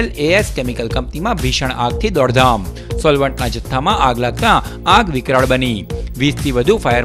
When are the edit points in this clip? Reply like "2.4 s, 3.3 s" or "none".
none

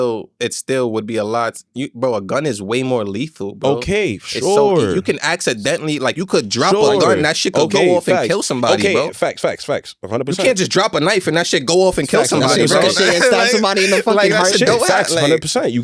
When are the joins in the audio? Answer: none

